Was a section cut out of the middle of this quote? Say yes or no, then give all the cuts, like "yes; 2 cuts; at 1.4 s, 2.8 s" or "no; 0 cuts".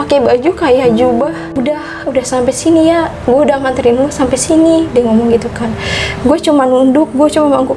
yes; 1 cut; at 1.5 s